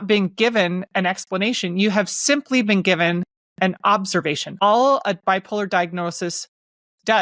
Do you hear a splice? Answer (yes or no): yes